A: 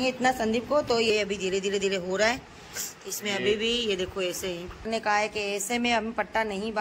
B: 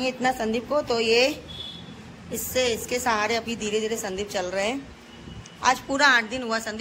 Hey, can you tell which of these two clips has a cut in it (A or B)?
A